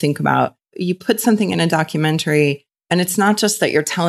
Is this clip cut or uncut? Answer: cut